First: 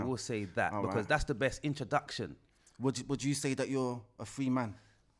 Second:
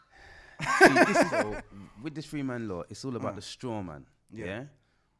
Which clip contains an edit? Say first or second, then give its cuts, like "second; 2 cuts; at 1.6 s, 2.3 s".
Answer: second; 1 cut; at 1.4 s